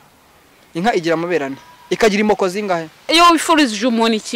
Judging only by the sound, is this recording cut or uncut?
cut